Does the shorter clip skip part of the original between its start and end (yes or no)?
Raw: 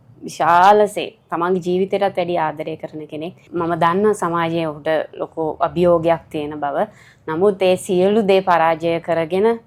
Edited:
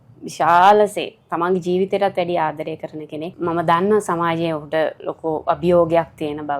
yes